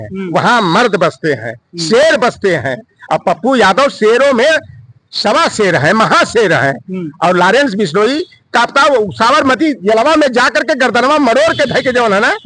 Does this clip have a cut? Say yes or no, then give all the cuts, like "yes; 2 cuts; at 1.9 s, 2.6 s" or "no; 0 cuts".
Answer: no; 0 cuts